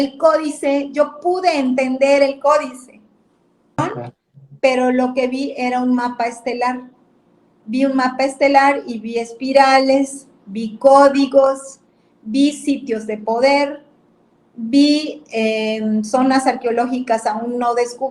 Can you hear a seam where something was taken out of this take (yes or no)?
yes